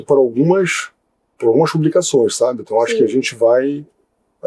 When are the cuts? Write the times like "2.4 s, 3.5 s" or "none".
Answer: none